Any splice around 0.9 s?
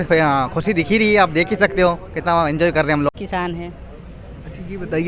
no; 1 cut; at 3.2 s

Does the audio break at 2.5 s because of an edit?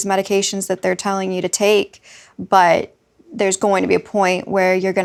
no; 0 cuts

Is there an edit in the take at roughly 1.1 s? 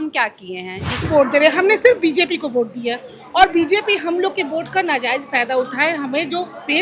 yes; 1 cut; at 1.1 s

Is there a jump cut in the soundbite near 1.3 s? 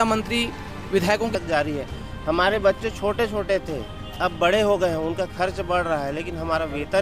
yes; 1 cut; at 1.3 s

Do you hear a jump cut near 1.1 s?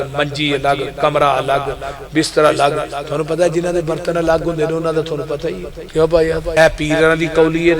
no; 2 cuts; at 5.8 s, 6.5 s

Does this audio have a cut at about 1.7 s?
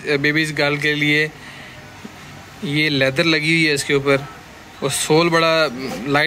no; 0 cuts

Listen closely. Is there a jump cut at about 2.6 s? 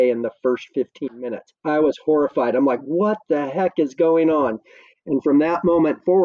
no; 0 cuts

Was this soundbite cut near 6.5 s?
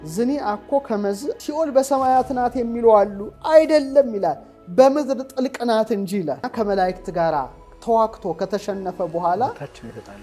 yes; 1 cut; at 6.5 s

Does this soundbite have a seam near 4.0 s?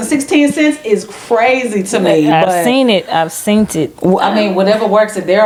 no; 0 cuts

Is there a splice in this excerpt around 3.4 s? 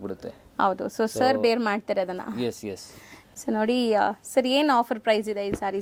no; 0 cuts

